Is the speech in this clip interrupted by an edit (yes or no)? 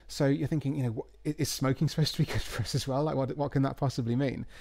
no